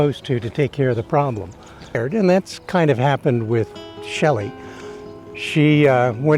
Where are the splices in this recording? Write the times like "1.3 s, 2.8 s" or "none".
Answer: 2.0 s